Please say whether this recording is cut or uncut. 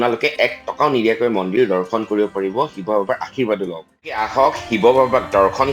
cut